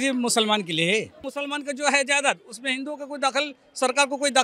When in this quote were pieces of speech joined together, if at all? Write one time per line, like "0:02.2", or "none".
0:01.3